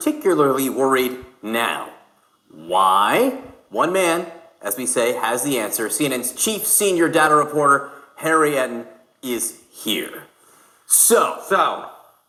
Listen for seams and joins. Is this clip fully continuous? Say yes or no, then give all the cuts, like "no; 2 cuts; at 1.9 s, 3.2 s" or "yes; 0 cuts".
yes; 0 cuts